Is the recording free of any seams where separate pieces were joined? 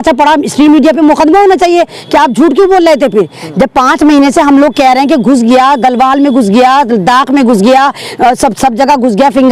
yes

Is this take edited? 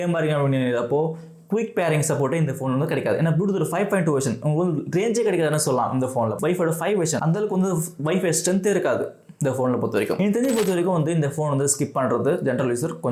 yes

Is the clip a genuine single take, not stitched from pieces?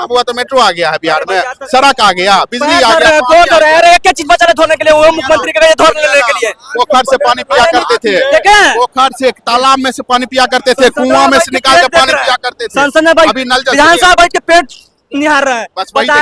yes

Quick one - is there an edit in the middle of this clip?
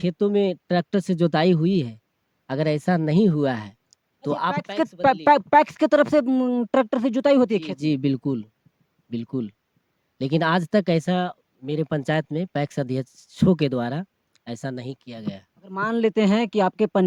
no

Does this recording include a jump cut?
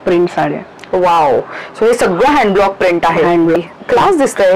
yes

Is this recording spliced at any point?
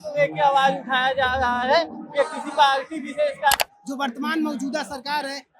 yes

